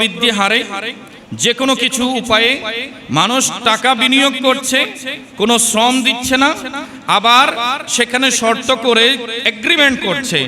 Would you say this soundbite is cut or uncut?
uncut